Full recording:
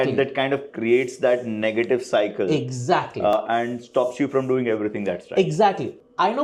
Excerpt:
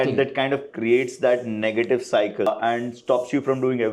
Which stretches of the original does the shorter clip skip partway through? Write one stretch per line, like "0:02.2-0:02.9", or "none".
0:02.5-0:03.3

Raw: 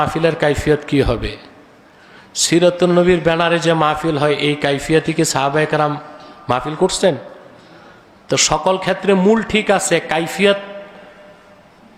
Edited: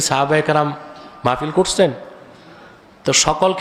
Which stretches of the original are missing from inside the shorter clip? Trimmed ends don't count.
none

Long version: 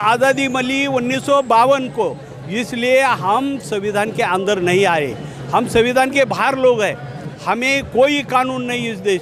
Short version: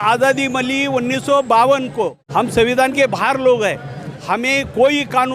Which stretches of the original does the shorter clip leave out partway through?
0:02.2-0:05.4

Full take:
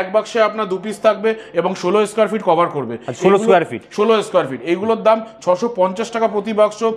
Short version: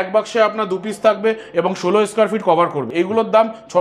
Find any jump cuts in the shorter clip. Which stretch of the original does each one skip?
0:02.8-0:04.6

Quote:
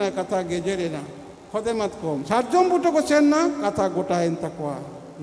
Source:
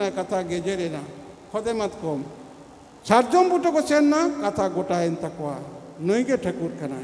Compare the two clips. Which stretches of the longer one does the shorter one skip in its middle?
0:02.2-0:03.1

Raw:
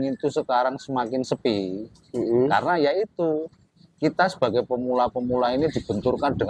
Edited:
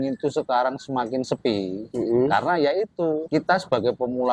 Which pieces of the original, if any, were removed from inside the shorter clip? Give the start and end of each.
0:01.8-0:02.0
0:03.4-0:03.9

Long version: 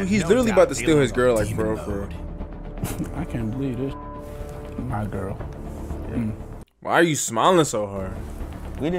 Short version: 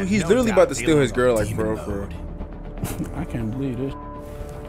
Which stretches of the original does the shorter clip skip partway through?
none

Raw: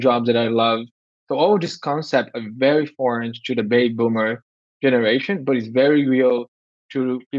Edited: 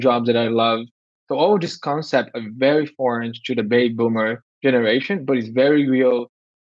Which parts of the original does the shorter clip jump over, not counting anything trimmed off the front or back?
0:04.4-0:04.6

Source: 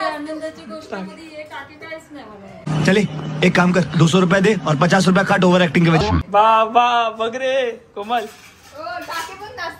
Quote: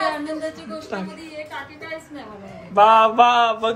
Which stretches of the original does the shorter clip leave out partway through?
0:02.6-0:06.2

